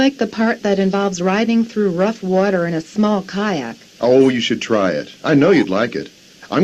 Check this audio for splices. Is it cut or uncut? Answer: uncut